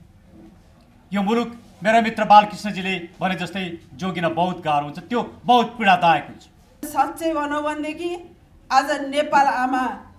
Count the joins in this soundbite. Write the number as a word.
one